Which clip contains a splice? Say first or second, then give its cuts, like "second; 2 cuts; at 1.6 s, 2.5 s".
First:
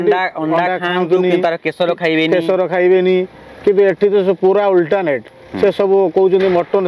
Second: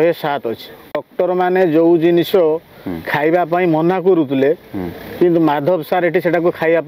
second; 1 cut; at 1.0 s